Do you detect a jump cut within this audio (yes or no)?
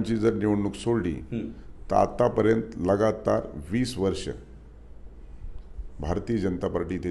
no